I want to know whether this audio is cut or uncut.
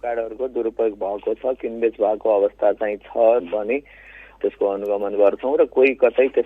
uncut